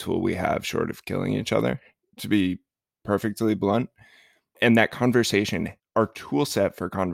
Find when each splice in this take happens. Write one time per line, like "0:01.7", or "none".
0:04.6
0:05.8